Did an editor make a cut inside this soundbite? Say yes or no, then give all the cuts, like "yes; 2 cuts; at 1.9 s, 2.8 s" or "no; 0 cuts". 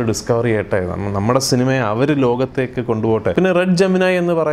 yes; 1 cut; at 3.3 s